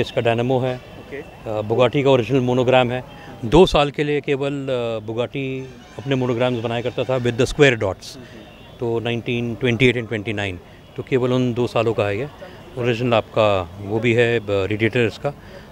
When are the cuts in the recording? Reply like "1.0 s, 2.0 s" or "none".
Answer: none